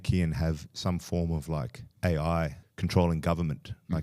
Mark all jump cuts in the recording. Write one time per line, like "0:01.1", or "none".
0:01.8
0:02.6